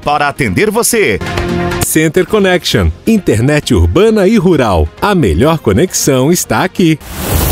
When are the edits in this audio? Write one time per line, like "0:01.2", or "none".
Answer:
none